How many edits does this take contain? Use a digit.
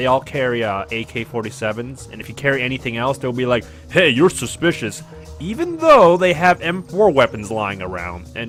0